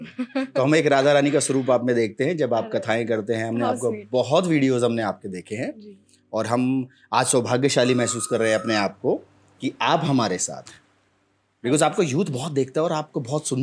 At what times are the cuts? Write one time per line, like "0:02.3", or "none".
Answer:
none